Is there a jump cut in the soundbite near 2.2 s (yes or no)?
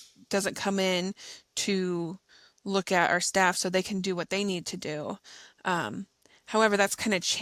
no